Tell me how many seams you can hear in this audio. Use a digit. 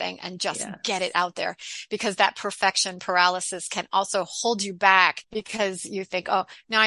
1